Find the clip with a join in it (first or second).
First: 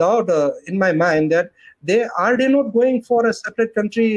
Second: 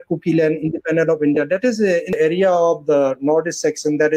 second